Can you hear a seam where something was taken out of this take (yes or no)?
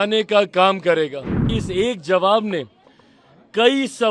yes